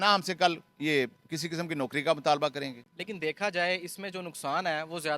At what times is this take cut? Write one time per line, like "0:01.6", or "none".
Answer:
0:02.8